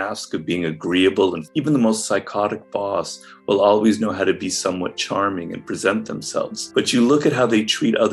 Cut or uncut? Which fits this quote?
cut